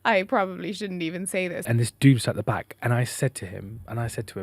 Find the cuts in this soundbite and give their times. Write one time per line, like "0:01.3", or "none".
0:01.6